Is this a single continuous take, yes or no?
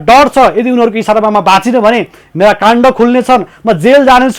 yes